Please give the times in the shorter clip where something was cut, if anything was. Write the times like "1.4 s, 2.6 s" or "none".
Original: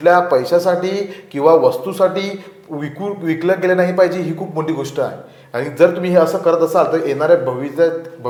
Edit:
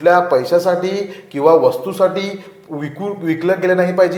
none